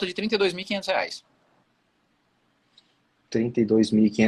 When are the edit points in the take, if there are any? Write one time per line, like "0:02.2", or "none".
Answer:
none